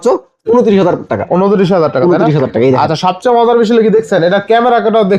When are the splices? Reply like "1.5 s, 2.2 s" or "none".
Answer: none